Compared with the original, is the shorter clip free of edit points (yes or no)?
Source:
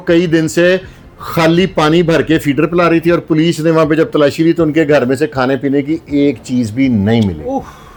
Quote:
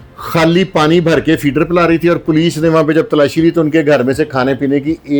yes